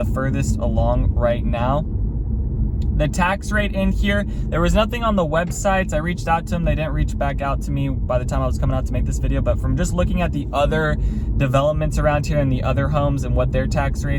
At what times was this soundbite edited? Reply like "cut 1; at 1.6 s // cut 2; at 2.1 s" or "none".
none